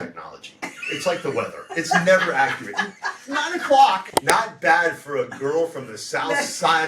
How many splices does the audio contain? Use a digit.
1